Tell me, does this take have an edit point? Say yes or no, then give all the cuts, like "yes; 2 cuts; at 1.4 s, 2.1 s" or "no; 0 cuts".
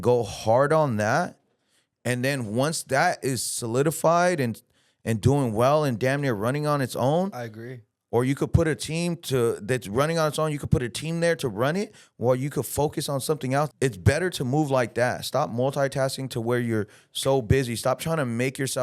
yes; 1 cut; at 13.7 s